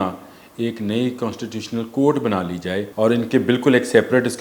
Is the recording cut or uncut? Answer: cut